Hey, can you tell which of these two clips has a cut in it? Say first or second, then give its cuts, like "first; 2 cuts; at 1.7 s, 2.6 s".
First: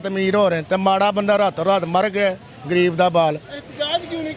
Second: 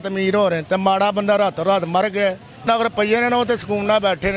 second; 1 cut; at 2.7 s